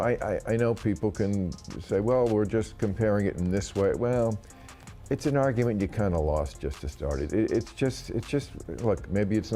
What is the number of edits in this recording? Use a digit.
0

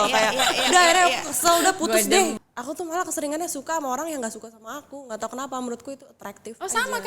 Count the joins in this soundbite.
1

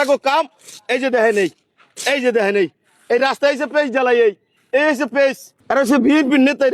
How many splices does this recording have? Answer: 1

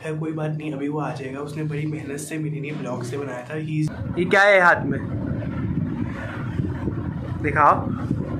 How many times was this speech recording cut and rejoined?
1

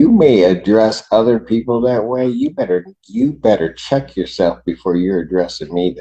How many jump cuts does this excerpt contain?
0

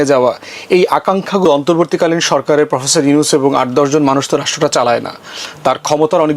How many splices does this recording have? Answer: 1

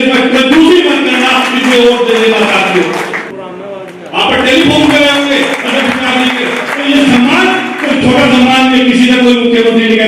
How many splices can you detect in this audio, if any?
1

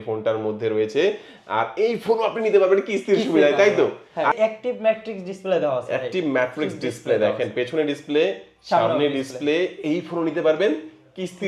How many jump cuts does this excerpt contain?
1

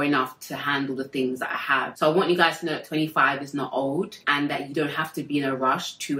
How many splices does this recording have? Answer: 0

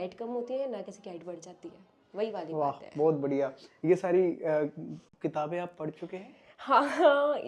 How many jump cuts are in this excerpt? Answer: 0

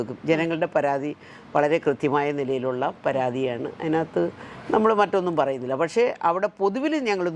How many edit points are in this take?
0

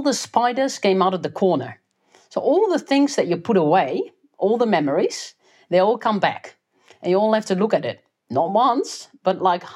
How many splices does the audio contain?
0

